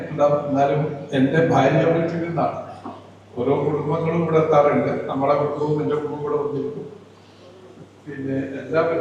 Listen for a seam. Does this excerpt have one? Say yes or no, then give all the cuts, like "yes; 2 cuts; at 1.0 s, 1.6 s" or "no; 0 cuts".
no; 0 cuts